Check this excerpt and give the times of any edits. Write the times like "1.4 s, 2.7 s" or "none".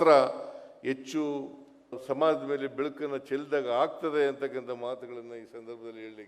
2.0 s